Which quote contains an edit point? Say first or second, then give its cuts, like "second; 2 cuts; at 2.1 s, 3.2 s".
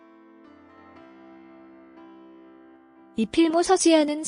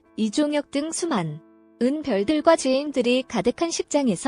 first; 1 cut; at 3.1 s